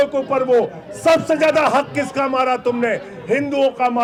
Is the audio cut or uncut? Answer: uncut